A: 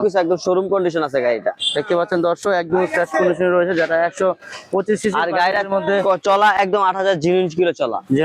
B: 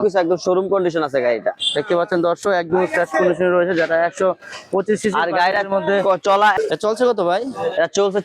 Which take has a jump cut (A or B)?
B